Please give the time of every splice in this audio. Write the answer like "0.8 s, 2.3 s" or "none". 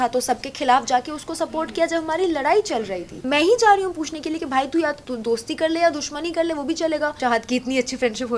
3.1 s, 7.2 s